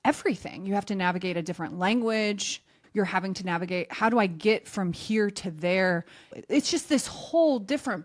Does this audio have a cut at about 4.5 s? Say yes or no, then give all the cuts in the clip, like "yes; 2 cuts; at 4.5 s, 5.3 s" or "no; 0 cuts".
no; 2 cuts; at 2.8 s, 6.3 s